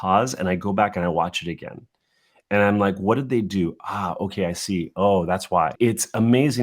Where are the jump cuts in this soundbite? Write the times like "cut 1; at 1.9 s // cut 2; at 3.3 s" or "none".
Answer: cut 1; at 5.7 s